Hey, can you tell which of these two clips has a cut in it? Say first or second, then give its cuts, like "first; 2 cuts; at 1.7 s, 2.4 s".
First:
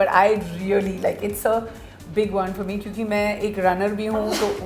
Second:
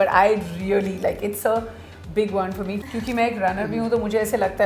second; 1 cut; at 2.9 s